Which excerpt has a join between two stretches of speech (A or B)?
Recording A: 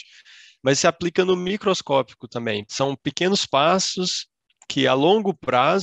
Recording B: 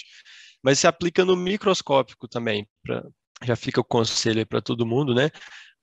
A